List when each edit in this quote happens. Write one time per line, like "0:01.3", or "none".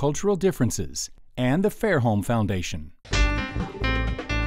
0:03.0